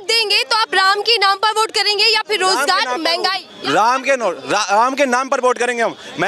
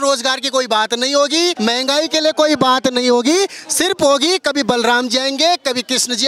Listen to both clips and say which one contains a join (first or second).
second